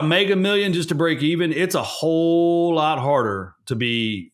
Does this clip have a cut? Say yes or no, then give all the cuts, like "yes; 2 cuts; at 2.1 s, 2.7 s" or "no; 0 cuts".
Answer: no; 0 cuts